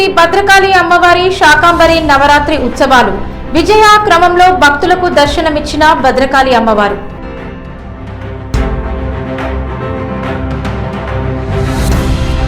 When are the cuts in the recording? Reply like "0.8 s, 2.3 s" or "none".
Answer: 8.4 s